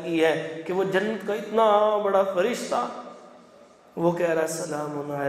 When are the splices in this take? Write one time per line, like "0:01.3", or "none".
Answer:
none